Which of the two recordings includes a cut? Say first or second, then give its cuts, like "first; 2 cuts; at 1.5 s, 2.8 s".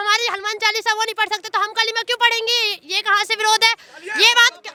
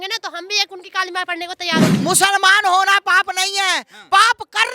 second; 1 cut; at 1.9 s